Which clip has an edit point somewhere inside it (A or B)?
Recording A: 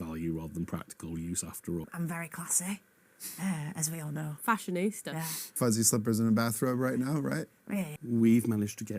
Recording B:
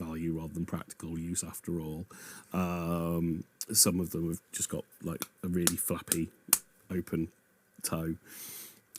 A